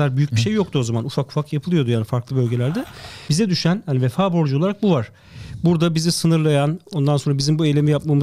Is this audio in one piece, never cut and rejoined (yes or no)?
no